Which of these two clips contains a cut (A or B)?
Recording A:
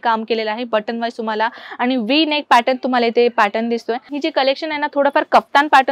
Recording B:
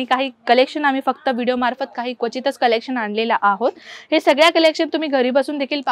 A